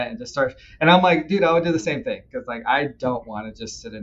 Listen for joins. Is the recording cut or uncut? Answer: cut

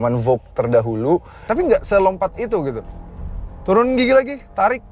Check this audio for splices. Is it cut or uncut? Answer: cut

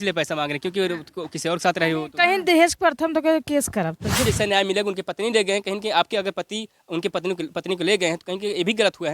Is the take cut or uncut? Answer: cut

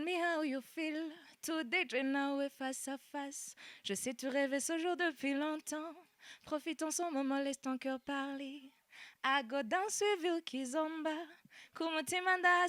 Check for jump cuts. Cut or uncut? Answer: uncut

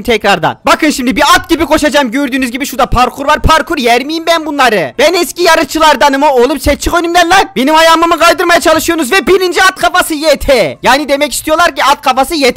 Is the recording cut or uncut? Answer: uncut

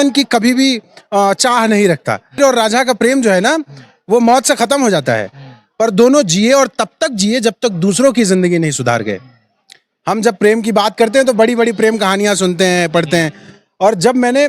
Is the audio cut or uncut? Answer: cut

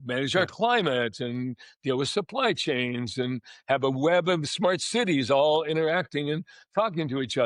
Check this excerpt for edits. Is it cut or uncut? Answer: uncut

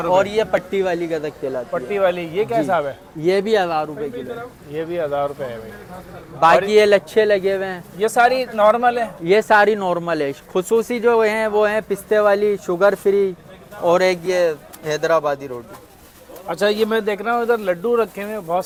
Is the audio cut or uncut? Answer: uncut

